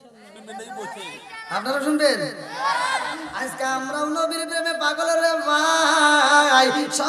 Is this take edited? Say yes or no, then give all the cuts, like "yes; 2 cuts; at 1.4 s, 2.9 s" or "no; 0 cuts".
yes; 1 cut; at 3.4 s